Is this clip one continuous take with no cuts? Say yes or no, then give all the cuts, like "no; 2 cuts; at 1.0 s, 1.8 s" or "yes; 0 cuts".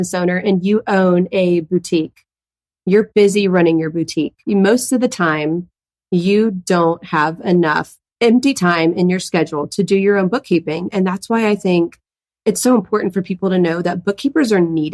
no; 2 cuts; at 4.4 s, 8.0 s